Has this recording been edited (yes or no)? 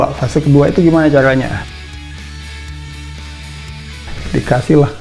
no